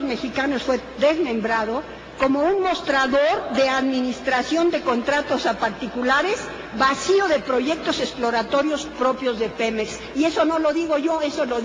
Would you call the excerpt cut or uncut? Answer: cut